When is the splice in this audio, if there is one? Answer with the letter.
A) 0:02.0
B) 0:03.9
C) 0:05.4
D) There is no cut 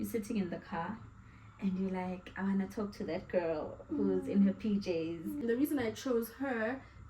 C